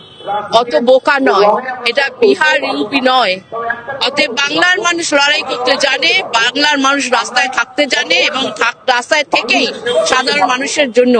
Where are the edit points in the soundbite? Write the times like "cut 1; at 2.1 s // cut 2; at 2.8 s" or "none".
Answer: none